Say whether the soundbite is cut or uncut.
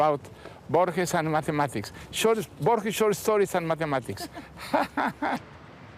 cut